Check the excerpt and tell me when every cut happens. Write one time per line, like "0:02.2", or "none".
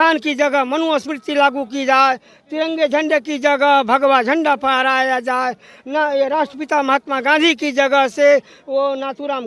none